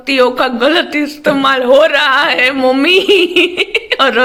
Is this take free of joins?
yes; 0 cuts

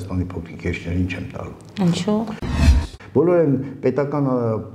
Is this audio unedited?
no; 1 cut; at 2.6 s

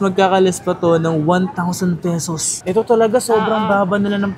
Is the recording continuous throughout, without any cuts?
no; 1 cut; at 2.6 s

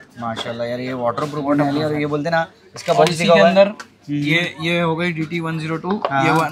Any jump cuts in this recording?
no; 0 cuts

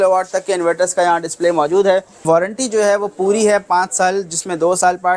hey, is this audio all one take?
no; 1 cut; at 2.2 s

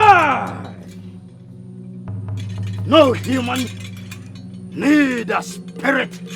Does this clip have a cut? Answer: yes; 1 cut; at 2.7 s

